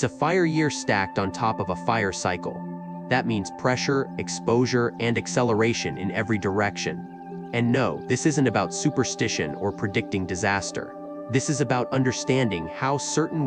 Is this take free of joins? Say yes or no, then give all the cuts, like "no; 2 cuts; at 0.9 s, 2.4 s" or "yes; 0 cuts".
yes; 0 cuts